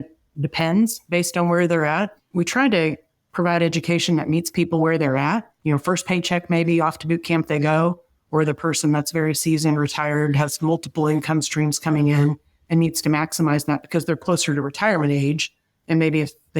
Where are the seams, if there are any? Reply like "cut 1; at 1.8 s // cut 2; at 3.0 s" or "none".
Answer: cut 1; at 2.2 s // cut 2; at 5.5 s